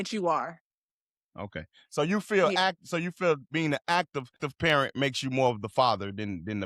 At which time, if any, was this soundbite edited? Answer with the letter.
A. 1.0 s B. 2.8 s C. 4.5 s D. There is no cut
C